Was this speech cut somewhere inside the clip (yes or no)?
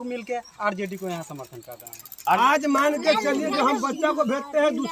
yes